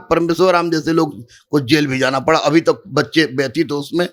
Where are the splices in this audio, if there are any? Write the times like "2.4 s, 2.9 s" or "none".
none